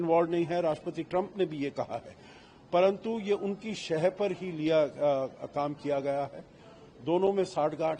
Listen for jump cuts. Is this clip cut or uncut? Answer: uncut